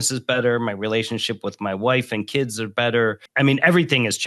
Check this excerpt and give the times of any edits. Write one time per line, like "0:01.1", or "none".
0:03.2